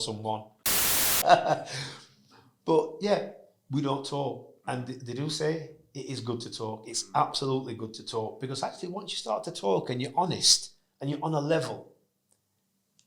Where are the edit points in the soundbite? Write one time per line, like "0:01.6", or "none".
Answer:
0:01.0